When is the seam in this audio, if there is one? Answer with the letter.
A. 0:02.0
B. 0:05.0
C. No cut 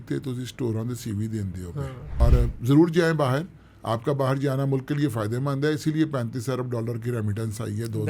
A